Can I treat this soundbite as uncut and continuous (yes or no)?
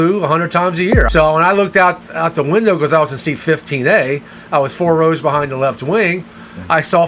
no